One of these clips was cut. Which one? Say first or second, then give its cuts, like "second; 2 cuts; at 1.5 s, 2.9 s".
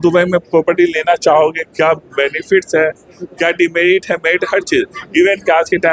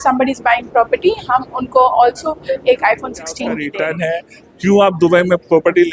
second; 1 cut; at 3.6 s